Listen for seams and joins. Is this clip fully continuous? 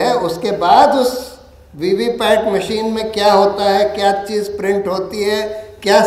yes; 0 cuts

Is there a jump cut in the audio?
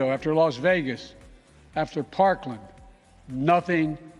no; 0 cuts

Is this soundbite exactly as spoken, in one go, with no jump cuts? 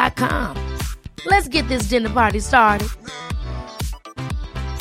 yes; 0 cuts

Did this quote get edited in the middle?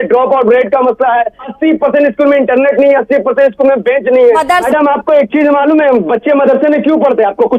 yes; 2 cuts; at 1.4 s, 4.5 s

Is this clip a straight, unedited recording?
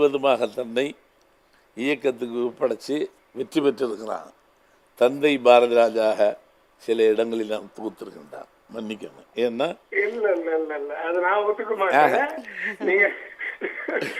yes; 0 cuts

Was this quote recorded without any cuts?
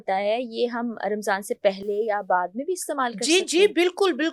yes; 0 cuts

